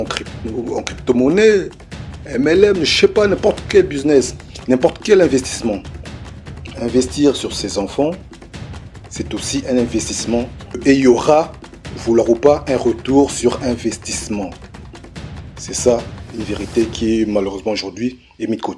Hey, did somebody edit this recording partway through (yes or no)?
no